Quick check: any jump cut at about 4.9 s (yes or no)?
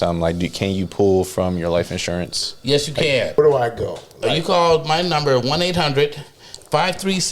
no